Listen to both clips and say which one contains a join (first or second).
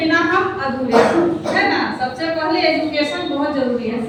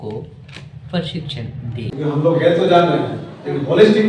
second